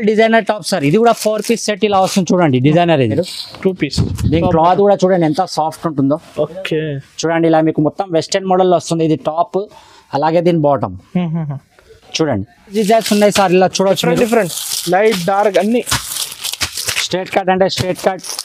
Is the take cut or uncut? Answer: cut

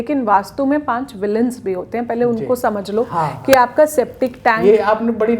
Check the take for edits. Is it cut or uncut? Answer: uncut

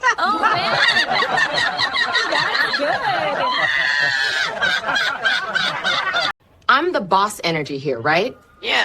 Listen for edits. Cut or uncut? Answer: uncut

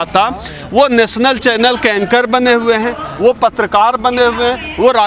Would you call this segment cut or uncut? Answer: uncut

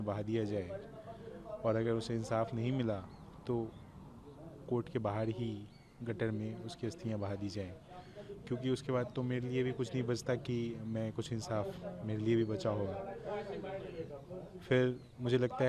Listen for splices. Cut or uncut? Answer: uncut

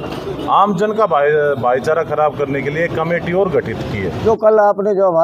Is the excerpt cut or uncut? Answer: cut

